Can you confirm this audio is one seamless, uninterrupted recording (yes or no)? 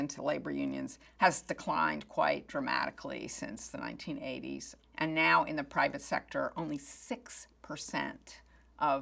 no